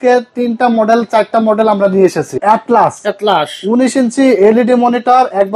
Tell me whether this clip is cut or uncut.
cut